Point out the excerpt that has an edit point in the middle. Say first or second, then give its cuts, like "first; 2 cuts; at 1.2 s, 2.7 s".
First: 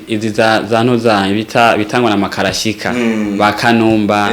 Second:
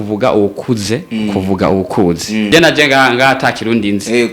second; 1 cut; at 2.5 s